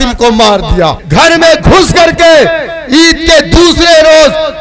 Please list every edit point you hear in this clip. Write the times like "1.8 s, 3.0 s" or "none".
1.0 s